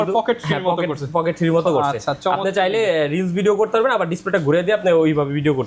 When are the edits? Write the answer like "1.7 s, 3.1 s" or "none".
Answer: none